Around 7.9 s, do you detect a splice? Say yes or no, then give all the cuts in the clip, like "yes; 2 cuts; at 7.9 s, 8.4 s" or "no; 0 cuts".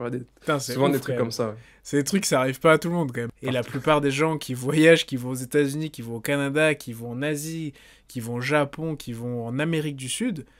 no; 1 cut; at 3.2 s